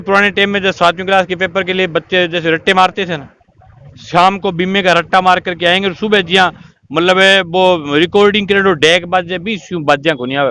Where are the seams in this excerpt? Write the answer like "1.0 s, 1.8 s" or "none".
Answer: none